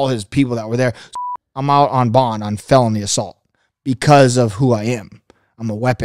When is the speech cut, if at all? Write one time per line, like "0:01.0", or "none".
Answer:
0:01.0